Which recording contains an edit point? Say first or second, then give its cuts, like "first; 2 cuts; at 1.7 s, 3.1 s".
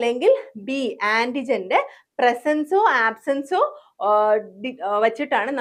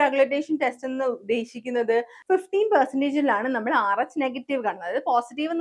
second; 1 cut; at 2.1 s